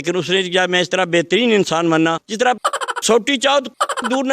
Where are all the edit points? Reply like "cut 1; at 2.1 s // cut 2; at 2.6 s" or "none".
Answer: cut 1; at 2.2 s